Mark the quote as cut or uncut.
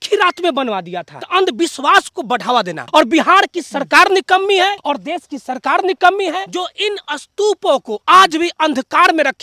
cut